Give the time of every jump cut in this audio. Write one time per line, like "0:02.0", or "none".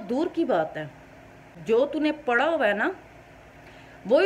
0:01.5